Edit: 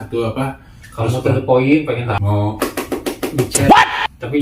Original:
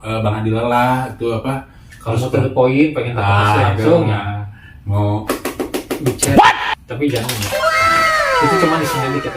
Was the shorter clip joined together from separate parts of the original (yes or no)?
yes